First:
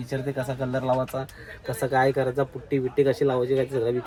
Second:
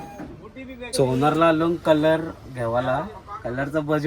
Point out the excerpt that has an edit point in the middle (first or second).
second